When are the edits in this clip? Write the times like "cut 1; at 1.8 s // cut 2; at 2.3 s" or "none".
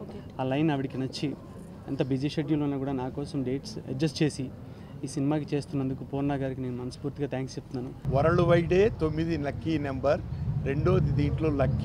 cut 1; at 8.0 s